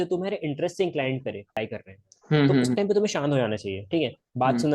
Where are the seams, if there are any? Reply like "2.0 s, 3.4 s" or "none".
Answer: 1.6 s